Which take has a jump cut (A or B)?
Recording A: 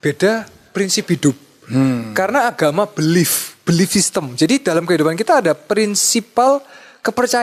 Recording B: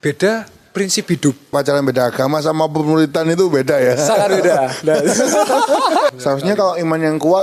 B